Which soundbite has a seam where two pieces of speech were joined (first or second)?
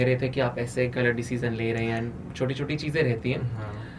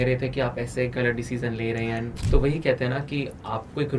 second